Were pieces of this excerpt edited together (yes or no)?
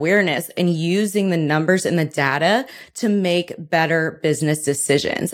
no